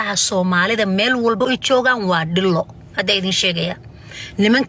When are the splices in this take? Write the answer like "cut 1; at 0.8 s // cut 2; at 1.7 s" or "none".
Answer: cut 1; at 1.4 s